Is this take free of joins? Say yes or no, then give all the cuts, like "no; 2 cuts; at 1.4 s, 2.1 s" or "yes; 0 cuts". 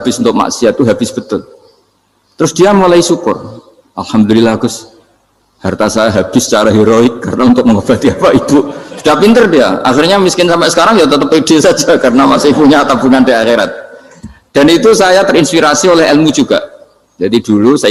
yes; 0 cuts